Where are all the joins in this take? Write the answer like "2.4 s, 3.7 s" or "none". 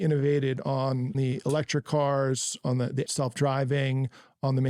1.2 s, 3.1 s